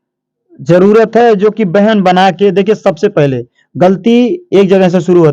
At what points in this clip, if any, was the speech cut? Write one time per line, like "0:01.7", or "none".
none